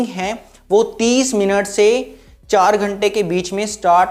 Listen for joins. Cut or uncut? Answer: uncut